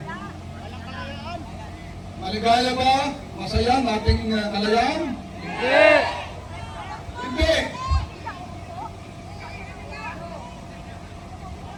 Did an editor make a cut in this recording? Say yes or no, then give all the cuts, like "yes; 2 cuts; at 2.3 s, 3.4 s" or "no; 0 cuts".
no; 0 cuts